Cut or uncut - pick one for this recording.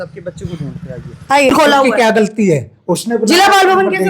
cut